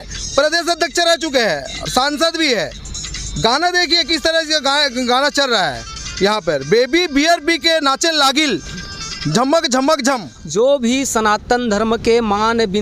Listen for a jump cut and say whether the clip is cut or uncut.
cut